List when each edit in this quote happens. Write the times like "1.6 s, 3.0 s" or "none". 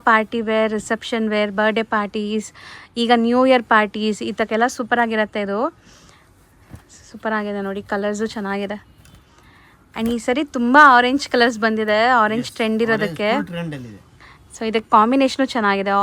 none